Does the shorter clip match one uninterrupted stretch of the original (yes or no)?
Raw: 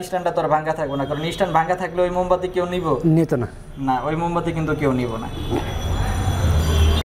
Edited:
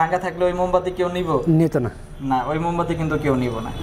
yes